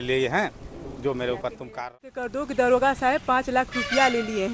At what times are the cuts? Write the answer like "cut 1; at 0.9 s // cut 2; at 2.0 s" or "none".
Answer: cut 1; at 1.9 s